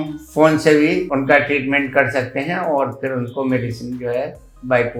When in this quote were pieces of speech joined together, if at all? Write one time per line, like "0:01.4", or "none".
none